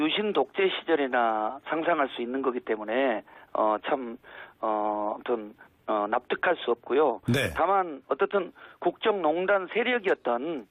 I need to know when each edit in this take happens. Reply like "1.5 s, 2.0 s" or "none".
none